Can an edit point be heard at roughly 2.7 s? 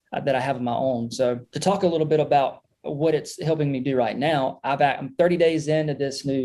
no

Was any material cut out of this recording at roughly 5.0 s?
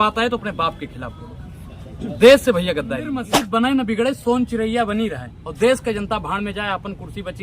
no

